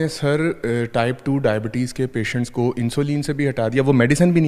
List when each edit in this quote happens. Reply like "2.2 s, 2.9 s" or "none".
none